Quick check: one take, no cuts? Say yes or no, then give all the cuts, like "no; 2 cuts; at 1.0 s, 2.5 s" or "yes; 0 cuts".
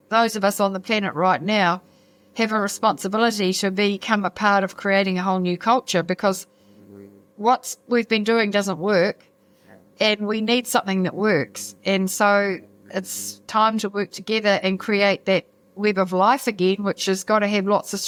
yes; 0 cuts